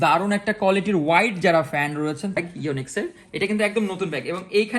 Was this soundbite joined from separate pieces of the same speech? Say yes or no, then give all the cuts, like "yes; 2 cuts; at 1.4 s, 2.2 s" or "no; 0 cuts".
yes; 1 cut; at 2.4 s